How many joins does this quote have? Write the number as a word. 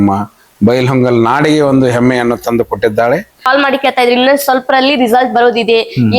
one